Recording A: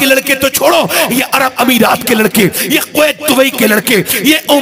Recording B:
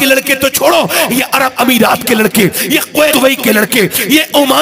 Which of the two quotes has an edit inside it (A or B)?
B